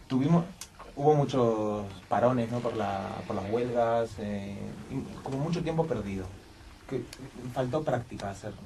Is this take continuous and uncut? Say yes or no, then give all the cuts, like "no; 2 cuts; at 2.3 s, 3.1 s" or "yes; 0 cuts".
no; 1 cut; at 2.4 s